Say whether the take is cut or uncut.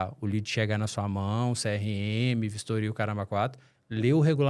uncut